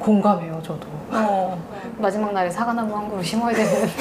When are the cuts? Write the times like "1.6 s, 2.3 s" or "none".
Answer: 1.8 s